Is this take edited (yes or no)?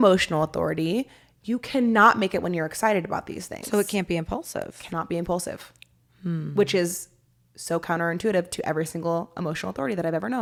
no